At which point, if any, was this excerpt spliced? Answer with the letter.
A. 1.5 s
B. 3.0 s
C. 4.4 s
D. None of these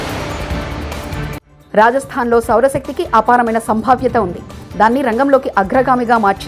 A